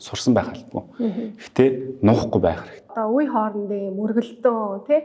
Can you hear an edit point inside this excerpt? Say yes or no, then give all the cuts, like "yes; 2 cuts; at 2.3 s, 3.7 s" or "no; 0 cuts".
yes; 1 cut; at 2.9 s